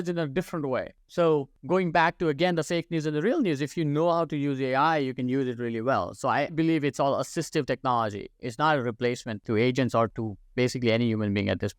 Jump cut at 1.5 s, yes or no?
yes